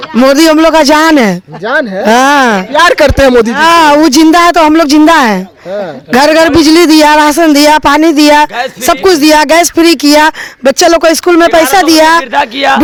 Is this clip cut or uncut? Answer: uncut